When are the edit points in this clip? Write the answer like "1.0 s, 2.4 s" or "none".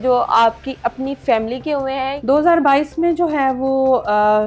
2.2 s